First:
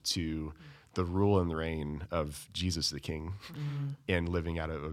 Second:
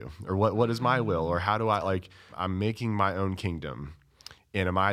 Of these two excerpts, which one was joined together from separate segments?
second; 1 cut; at 2.3 s

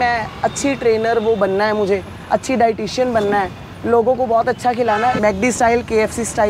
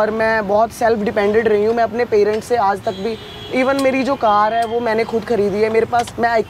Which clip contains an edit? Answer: first; 1 cut; at 5.2 s

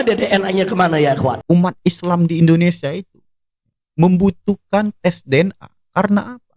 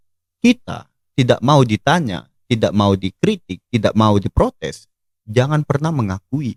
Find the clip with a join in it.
first; 1 cut; at 1.4 s

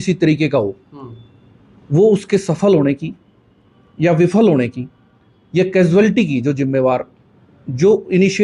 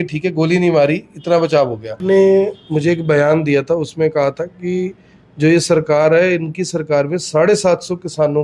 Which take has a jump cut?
second; 1 cut; at 2.0 s

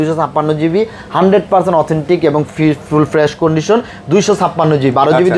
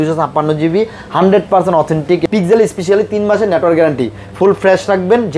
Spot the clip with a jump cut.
second; 1 cut; at 2.2 s

